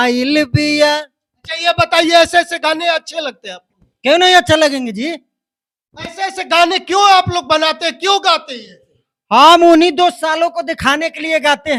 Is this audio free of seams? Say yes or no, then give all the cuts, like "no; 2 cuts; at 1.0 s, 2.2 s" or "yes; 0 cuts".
yes; 0 cuts